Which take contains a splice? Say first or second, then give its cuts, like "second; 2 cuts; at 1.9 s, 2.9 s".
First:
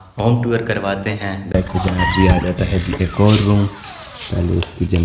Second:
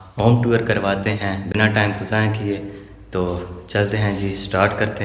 first; 1 cut; at 1.5 s